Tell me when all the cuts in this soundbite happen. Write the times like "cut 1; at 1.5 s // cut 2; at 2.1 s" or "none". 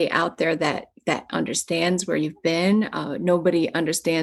none